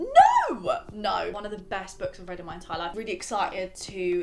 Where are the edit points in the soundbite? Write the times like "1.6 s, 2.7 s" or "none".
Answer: 1.3 s, 2.9 s